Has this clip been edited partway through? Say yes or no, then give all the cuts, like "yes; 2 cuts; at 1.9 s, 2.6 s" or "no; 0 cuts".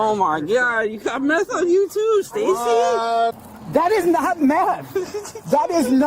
yes; 1 cut; at 3.4 s